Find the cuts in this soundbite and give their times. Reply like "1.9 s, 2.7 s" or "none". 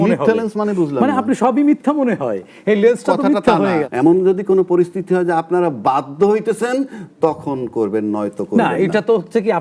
3.9 s